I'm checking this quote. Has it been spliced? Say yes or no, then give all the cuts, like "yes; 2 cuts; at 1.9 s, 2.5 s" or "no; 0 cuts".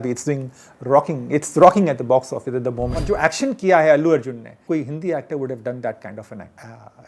yes; 2 cuts; at 3.0 s, 4.5 s